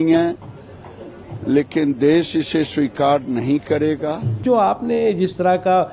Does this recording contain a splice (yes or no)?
yes